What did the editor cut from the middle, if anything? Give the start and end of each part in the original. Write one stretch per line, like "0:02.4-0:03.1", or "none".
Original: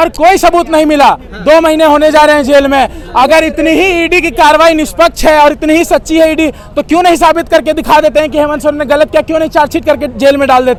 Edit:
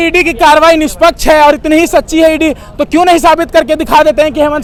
none